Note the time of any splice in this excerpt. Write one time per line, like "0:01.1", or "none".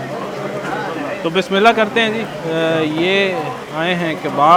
none